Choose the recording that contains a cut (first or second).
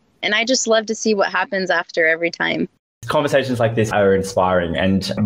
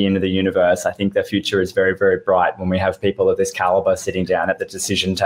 first